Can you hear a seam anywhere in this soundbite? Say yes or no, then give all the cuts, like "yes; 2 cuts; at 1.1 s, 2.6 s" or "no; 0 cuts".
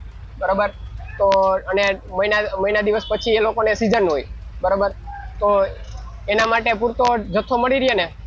no; 0 cuts